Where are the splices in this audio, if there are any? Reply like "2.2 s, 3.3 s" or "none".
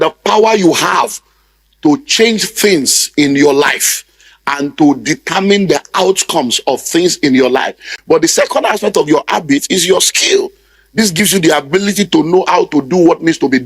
7.9 s